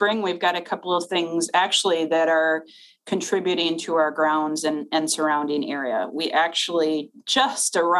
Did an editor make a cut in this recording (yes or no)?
no